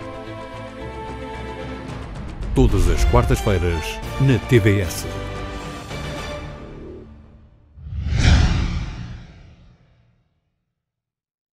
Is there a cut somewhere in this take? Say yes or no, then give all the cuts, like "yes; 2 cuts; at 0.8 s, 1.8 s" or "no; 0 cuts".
no; 0 cuts